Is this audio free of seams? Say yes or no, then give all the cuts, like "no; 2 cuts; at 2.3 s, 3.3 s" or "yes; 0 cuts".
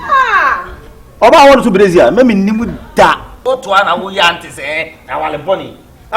no; 1 cut; at 3.3 s